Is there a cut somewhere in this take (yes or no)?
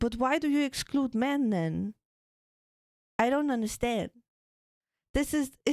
no